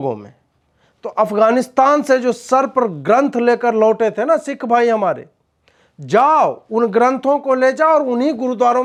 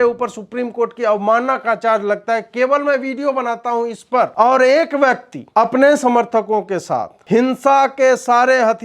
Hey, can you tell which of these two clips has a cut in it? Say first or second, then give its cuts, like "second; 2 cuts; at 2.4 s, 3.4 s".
second; 3 cuts; at 4.3 s, 5.3 s, 7.1 s